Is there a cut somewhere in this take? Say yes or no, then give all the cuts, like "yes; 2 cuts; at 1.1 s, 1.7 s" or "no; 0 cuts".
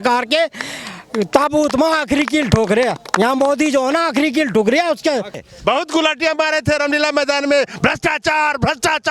yes; 1 cut; at 5.4 s